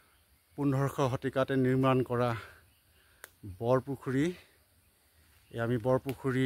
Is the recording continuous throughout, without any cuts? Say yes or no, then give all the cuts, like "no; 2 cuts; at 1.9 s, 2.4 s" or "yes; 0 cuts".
yes; 0 cuts